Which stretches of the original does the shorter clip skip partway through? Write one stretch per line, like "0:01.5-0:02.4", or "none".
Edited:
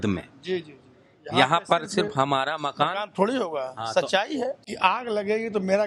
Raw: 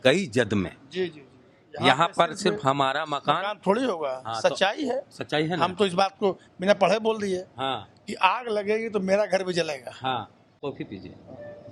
0:05.1-0:08.0